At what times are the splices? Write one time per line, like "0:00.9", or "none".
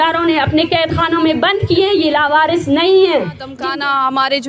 0:03.5

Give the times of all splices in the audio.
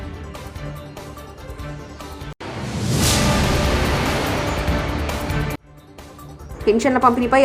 none

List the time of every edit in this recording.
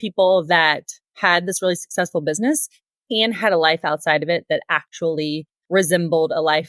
0:05.5

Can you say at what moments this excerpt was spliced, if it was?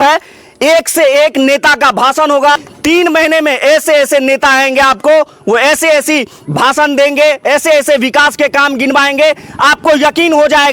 0:02.7

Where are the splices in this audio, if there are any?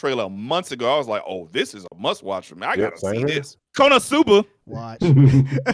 0:03.6

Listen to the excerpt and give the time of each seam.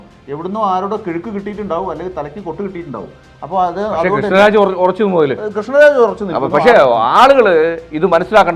none

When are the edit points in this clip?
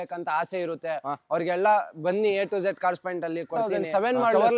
0:03.5

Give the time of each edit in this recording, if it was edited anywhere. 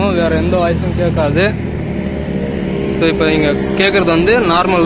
none

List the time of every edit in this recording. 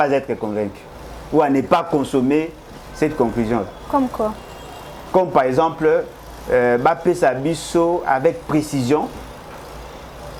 none

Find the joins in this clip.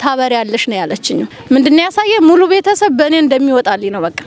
0:01.3

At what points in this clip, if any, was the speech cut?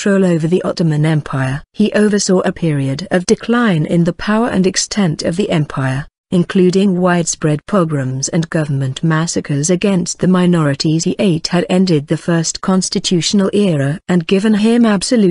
none

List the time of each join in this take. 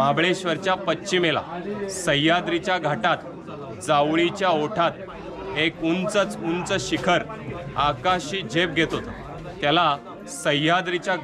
none

